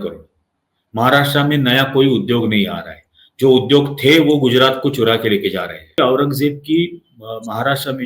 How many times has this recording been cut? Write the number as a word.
one